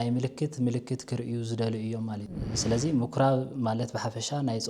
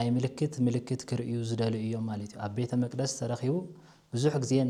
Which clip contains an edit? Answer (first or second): first